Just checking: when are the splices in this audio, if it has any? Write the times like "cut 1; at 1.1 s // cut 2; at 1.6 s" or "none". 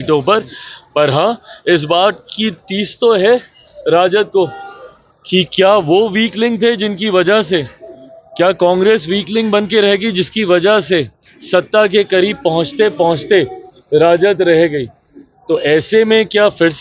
none